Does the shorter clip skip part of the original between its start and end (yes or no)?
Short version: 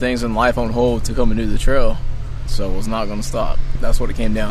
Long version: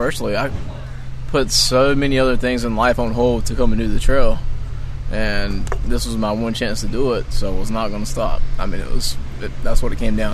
yes